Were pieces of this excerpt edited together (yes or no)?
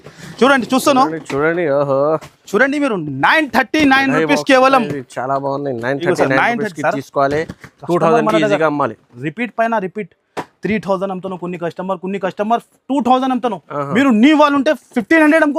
no